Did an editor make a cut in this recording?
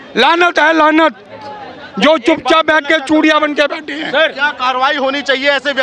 no; 0 cuts

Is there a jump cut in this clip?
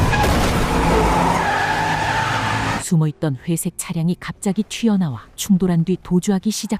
yes; 1 cut; at 5.3 s

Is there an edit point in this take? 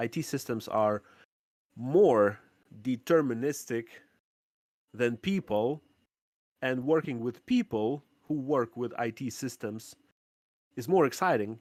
no; 0 cuts

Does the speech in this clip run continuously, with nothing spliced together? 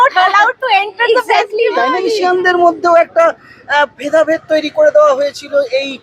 no; 1 cut; at 2.0 s

